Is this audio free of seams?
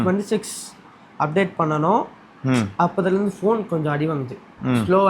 yes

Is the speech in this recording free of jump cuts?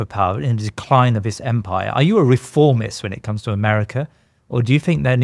yes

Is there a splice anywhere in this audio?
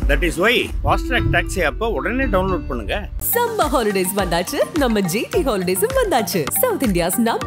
no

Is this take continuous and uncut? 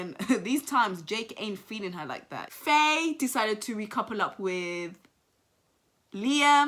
yes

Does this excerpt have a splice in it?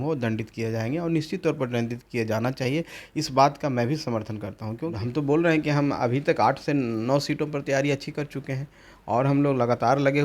yes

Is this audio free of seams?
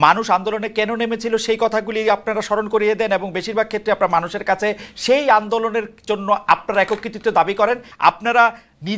no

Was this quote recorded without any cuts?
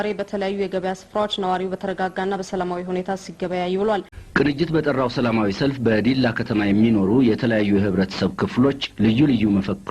no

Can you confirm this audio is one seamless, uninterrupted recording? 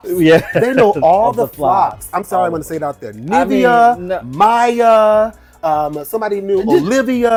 yes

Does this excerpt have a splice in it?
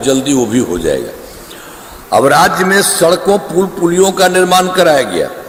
no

